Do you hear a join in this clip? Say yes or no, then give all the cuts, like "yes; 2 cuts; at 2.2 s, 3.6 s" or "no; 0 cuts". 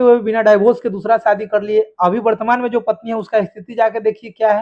no; 0 cuts